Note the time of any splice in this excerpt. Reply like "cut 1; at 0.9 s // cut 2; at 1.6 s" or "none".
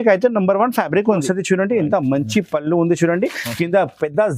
cut 1; at 1.2 s